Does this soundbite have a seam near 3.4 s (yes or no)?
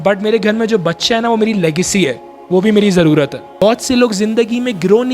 yes